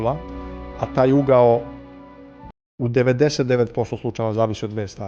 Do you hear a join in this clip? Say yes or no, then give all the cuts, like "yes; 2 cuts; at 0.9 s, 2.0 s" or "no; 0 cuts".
no; 0 cuts